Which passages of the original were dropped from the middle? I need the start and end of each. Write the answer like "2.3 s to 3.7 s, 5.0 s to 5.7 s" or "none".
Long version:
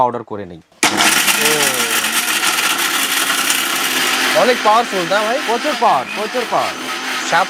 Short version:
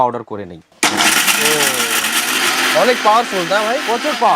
2.4 s to 4.0 s